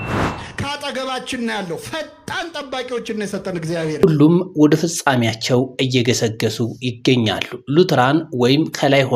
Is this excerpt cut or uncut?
cut